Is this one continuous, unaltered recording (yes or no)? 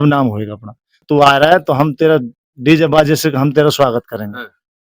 no